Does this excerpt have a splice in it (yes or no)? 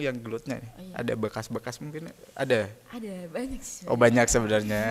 no